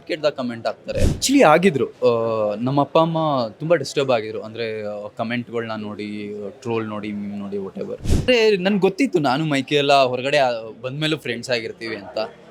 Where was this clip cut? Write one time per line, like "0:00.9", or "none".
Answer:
0:01.2
0:08.3